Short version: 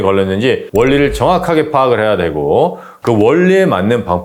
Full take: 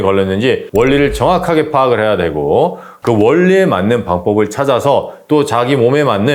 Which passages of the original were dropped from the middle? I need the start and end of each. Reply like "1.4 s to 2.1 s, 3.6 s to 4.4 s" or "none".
none

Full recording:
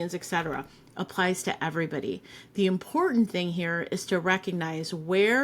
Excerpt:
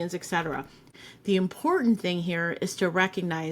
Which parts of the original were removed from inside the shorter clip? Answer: 1.0 s to 2.3 s

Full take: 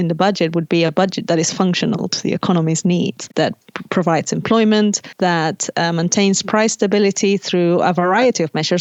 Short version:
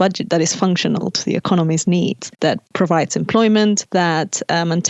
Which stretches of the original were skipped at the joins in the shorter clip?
3.3 s to 3.5 s, 5.0 s to 5.1 s

